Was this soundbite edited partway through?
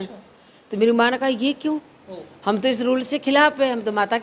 no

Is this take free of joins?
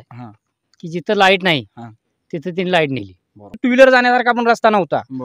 no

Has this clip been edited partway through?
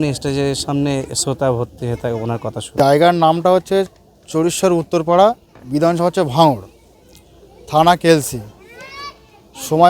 yes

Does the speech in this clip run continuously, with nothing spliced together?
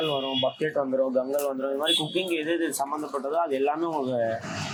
yes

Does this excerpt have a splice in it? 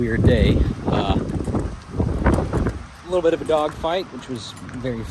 no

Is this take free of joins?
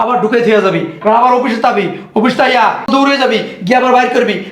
no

